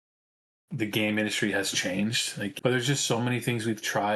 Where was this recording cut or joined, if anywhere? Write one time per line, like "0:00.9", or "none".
0:02.5